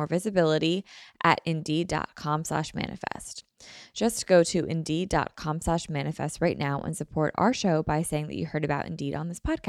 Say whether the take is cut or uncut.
uncut